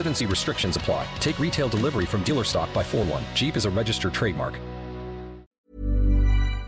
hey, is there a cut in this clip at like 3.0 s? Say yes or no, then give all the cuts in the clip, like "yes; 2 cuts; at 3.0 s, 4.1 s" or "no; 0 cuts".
no; 1 cut; at 5.5 s